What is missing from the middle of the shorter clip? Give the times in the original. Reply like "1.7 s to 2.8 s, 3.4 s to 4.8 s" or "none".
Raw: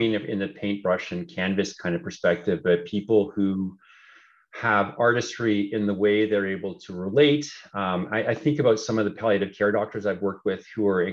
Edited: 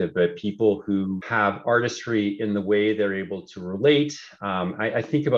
3.7 s to 4.6 s